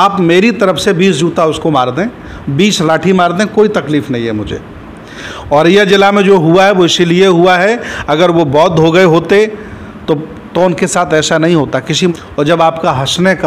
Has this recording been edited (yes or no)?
yes